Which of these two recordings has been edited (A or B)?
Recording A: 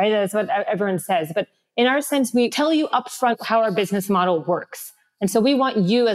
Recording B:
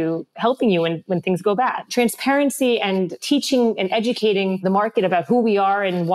B